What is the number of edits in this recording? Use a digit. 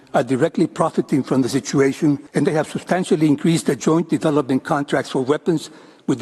1